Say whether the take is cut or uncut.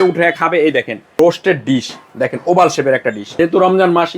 cut